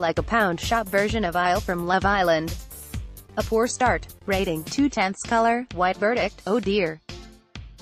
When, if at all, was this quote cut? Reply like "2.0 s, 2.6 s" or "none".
6.9 s